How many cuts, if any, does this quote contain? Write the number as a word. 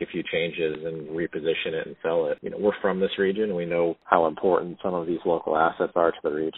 two